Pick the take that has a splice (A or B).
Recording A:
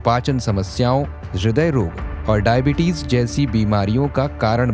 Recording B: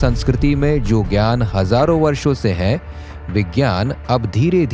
A